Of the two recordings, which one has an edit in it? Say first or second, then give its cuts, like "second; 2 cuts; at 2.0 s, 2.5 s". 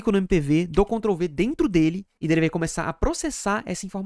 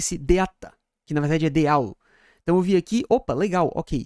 first; 1 cut; at 2.1 s